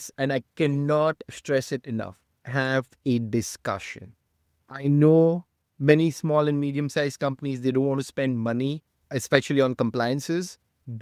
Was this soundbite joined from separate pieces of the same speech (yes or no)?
yes